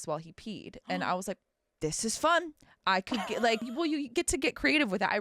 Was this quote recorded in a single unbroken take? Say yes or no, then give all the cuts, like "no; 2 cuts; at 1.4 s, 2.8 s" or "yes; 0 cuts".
no; 1 cut; at 3.7 s